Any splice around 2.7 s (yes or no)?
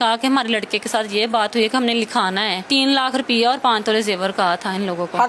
yes